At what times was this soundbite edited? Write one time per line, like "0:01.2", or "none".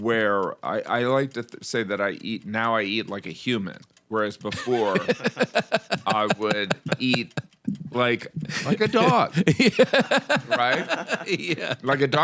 none